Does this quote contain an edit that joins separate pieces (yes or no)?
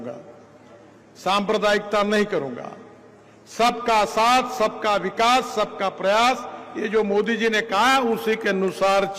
no